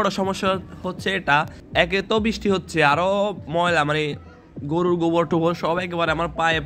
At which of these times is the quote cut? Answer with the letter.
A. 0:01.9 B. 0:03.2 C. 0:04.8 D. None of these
A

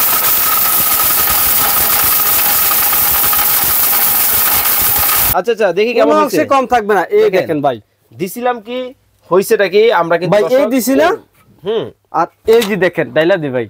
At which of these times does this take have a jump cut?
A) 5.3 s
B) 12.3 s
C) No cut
A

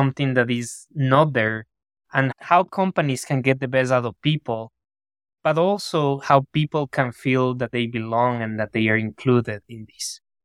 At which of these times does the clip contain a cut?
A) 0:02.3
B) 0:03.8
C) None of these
A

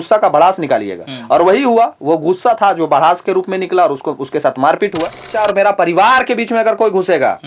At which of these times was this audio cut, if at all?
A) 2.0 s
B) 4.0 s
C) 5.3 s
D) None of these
C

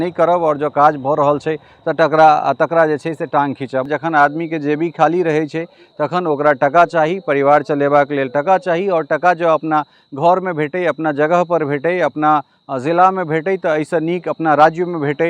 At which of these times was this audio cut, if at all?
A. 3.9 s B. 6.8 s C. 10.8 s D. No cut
A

